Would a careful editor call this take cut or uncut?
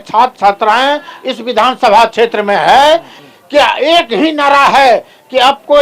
cut